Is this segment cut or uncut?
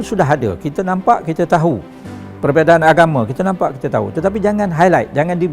uncut